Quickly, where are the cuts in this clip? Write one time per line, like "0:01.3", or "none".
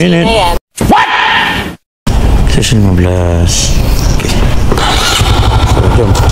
none